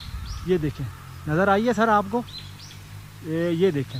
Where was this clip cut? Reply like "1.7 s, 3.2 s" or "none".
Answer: none